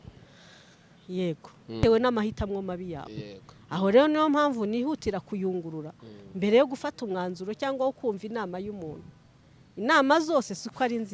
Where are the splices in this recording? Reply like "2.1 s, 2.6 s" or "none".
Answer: 1.8 s